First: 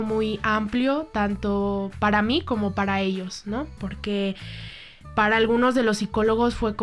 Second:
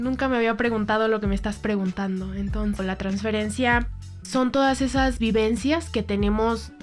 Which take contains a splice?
second; 1 cut; at 2.8 s

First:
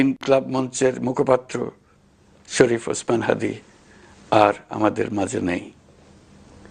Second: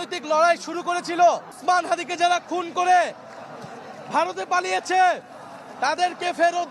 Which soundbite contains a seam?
second; 1 cut; at 1.5 s

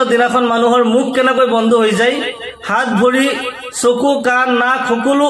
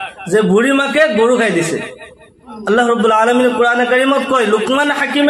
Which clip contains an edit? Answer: second; 1 cut; at 2.5 s

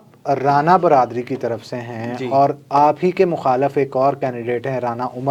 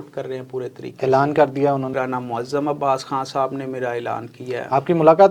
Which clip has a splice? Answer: second; 1 cut; at 1.9 s

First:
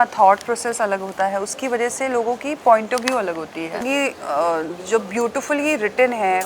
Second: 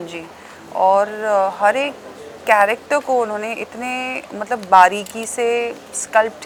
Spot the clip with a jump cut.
first; 1 cut; at 3.8 s

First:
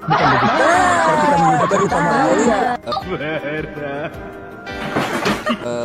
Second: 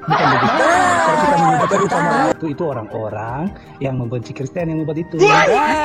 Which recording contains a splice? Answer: second; 1 cut; at 2.3 s

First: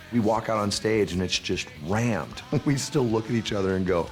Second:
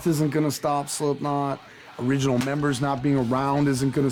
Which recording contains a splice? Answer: first; 1 cut; at 2.4 s

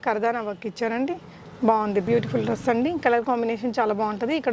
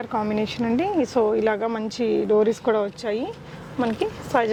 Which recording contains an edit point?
first; 1 cut; at 2.1 s

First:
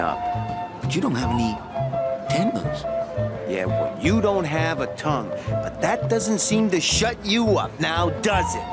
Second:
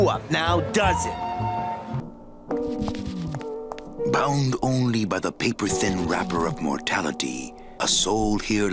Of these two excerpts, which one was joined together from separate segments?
first; 1 cut; at 5.8 s

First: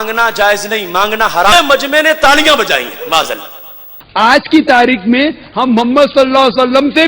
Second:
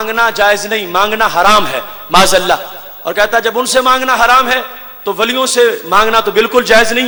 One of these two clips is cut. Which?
first; 1 cut; at 1.5 s

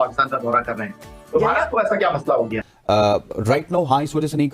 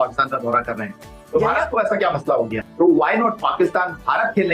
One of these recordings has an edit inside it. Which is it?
first; 1 cut; at 2.6 s

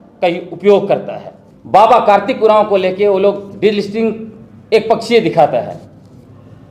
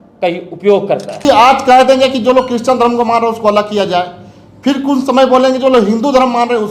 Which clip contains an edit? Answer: second; 1 cut; at 1.3 s

